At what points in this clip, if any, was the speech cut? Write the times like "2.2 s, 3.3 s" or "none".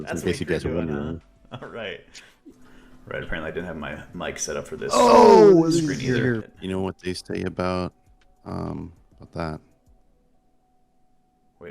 2.4 s, 6.5 s

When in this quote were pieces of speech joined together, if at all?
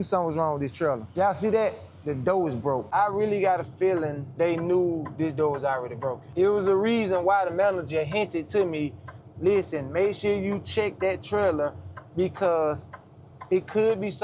1.1 s, 2.9 s, 4.2 s, 6.2 s

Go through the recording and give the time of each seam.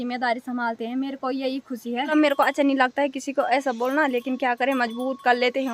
2.1 s

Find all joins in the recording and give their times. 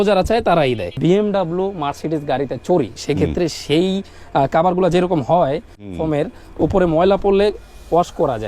1.0 s

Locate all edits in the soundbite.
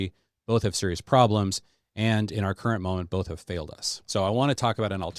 none

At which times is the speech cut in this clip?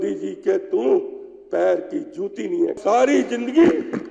2.8 s

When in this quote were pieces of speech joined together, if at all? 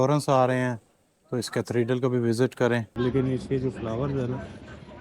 2.9 s

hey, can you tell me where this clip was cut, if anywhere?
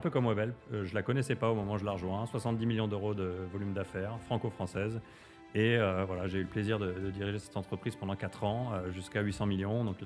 none

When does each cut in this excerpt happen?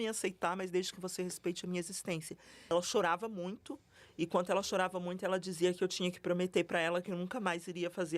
2.7 s

